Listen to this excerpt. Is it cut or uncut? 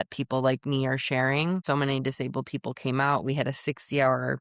cut